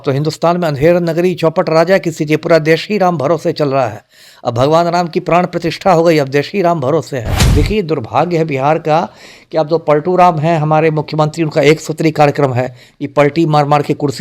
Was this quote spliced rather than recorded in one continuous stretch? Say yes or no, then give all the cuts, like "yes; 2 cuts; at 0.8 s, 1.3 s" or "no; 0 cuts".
yes; 1 cut; at 7.4 s